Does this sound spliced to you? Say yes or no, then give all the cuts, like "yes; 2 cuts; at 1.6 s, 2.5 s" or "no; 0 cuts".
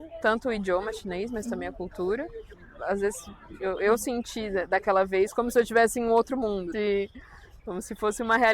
yes; 2 cuts; at 2.7 s, 6.7 s